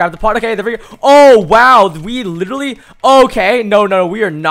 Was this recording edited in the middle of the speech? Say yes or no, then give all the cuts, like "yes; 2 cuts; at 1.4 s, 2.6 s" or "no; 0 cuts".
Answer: no; 0 cuts